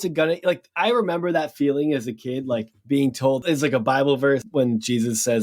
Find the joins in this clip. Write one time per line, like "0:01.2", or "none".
0:03.3
0:04.5